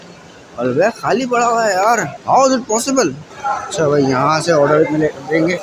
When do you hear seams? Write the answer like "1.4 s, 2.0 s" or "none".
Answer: 2.1 s, 3.3 s